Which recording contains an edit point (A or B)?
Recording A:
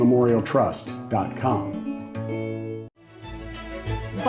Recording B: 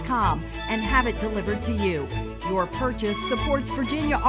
A